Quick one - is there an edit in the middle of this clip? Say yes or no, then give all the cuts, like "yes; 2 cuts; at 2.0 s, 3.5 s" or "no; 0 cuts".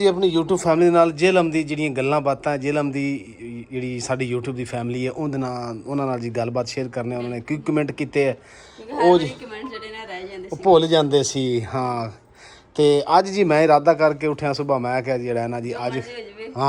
no; 0 cuts